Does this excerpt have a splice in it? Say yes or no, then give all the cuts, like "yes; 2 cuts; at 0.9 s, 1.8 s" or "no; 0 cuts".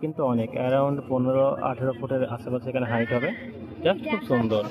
no; 0 cuts